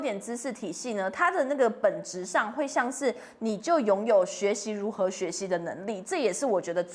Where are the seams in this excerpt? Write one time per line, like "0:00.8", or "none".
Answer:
none